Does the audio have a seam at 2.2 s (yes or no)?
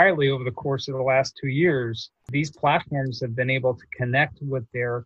yes